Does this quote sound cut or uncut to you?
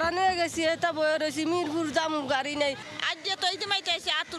uncut